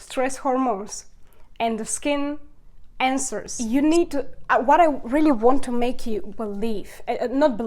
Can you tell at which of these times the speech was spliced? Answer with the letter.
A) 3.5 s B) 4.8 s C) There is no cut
A